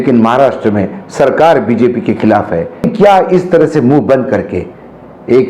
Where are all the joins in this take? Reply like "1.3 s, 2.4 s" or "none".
2.8 s